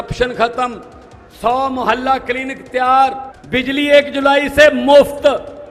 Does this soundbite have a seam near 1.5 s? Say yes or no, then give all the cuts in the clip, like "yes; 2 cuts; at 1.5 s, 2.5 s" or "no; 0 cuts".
no; 1 cut; at 3.3 s